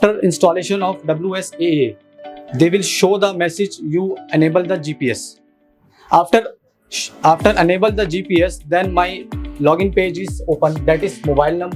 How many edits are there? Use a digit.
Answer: 0